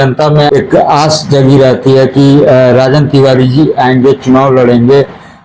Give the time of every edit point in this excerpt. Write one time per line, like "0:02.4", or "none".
none